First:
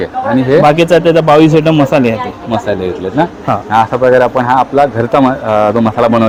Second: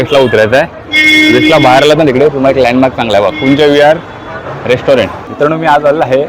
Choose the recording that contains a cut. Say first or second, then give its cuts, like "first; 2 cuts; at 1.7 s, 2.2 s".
second; 1 cut; at 5.2 s